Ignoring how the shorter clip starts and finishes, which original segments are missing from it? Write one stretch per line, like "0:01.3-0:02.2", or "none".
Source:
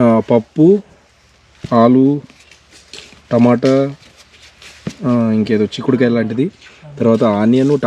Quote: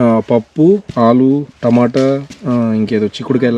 0:00.9-0:01.6
0:02.3-0:03.2
0:04.0-0:04.9